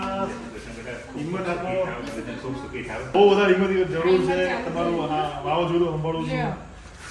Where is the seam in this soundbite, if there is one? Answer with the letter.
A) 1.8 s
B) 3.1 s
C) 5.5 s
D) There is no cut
B